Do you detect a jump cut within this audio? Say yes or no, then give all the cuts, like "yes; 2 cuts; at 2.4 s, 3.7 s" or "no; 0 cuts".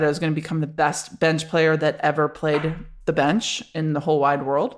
no; 0 cuts